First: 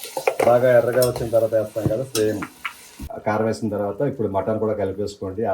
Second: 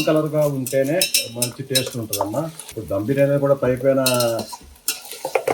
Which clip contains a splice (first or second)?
first